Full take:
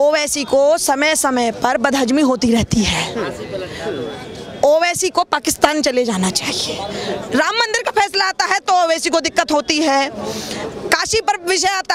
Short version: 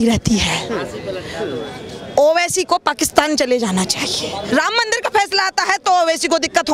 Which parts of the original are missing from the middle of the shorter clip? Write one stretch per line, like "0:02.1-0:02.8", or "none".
0:06.9-0:07.3